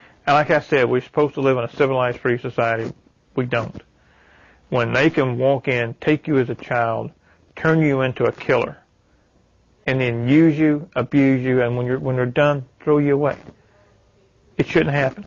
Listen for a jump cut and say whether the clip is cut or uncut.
uncut